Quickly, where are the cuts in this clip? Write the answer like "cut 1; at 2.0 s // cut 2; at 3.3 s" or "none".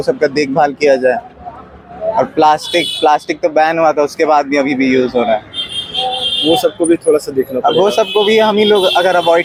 none